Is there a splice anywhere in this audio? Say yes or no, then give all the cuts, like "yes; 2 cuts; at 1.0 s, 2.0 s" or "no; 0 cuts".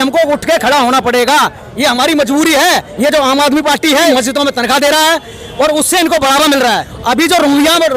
yes; 3 cuts; at 2.9 s, 4.1 s, 6.9 s